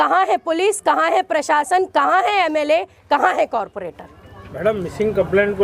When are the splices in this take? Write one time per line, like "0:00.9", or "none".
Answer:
none